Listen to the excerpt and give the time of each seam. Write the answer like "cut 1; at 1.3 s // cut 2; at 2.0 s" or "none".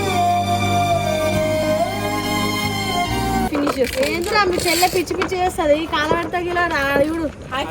cut 1; at 3.5 s